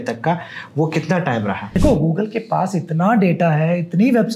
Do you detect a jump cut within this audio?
yes; 1 cut; at 1.7 s

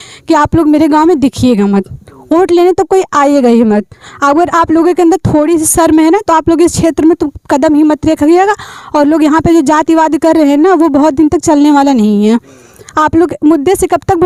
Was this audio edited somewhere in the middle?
no; 0 cuts

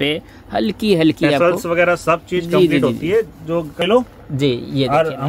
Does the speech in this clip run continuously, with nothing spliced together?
no; 1 cut; at 3.8 s

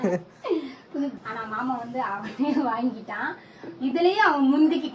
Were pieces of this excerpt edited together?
yes; 1 cut; at 1.1 s

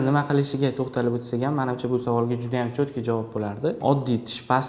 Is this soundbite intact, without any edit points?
no; 1 cut; at 3.8 s

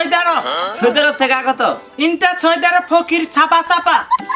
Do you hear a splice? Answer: no; 0 cuts

